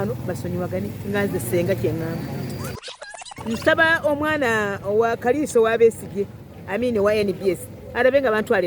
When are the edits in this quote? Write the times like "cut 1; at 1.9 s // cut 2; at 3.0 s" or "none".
cut 1; at 2.8 s